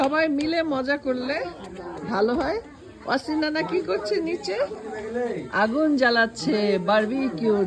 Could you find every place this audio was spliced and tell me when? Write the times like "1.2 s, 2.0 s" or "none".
none